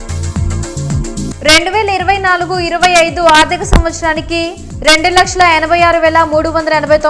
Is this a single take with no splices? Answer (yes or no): no